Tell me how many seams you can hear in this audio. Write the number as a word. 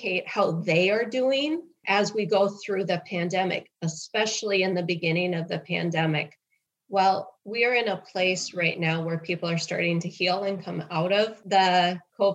two